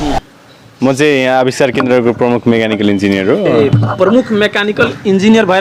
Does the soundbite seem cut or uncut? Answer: uncut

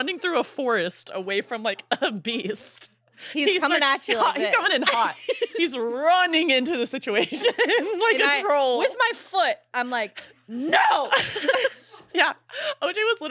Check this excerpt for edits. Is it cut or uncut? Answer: uncut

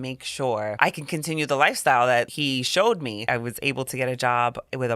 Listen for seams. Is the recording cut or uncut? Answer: cut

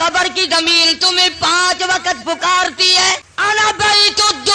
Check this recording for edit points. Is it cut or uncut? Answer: cut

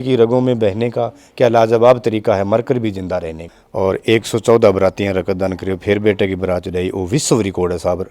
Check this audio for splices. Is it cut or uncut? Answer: cut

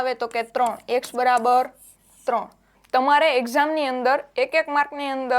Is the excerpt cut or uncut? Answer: cut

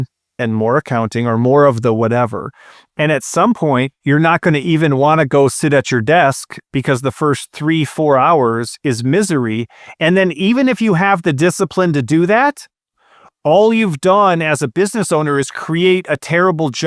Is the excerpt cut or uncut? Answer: uncut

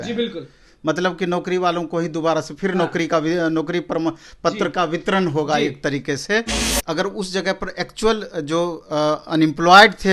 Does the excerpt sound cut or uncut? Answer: cut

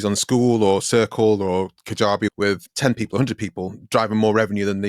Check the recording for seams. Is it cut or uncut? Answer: cut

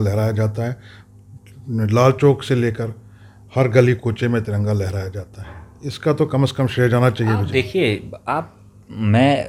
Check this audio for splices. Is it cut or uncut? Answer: uncut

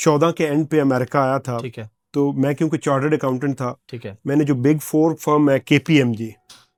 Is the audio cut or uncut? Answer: uncut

